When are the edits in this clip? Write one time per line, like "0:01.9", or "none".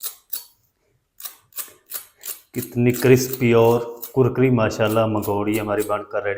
none